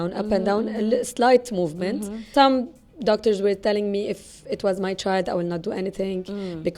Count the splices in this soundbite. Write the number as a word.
one